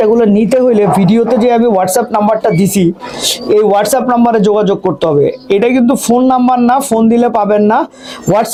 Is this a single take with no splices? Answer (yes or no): yes